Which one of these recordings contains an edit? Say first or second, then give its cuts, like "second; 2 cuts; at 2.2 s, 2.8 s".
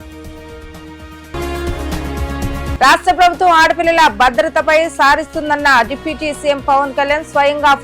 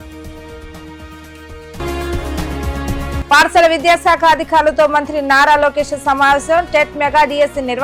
first; 2 cuts; at 1.3 s, 2.8 s